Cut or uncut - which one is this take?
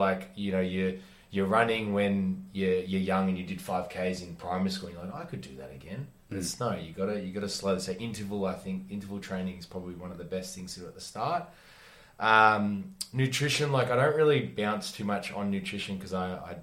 uncut